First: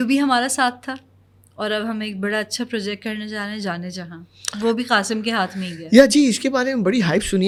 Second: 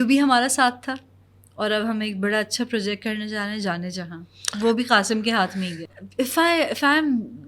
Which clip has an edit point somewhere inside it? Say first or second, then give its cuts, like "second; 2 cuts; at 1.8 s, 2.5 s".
second; 1 cut; at 5.8 s